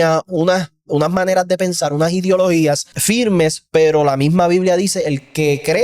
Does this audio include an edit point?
yes; 1 cut; at 2.9 s

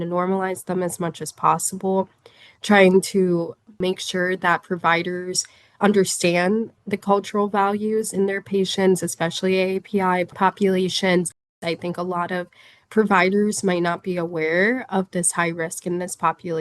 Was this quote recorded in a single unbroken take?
no; 3 cuts; at 3.8 s, 10.3 s, 11.5 s

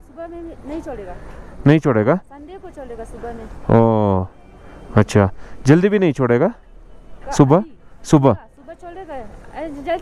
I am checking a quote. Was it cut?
no; 0 cuts

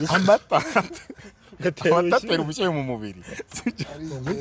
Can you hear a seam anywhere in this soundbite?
no; 0 cuts

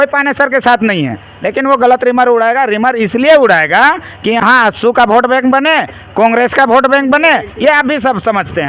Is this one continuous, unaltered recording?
yes; 0 cuts

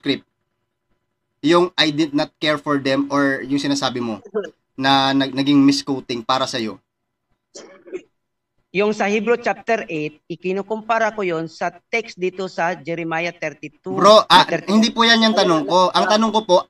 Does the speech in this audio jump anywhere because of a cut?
no; 0 cuts

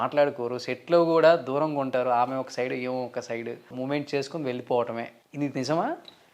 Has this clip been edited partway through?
yes; 2 cuts; at 3.7 s, 5.2 s

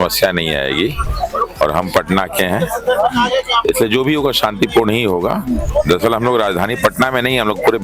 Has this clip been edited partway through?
yes; 2 cuts; at 1.1 s, 5.7 s

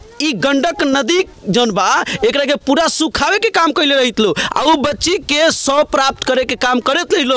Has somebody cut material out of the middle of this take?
no; 0 cuts

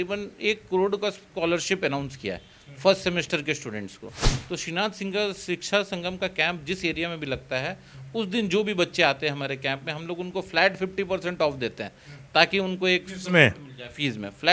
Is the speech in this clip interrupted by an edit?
yes; 1 cut; at 4.3 s

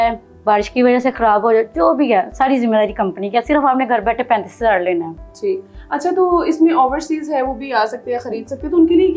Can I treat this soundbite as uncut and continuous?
yes; 0 cuts

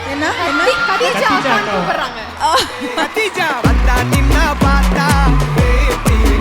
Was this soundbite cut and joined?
yes; 1 cut; at 1.0 s

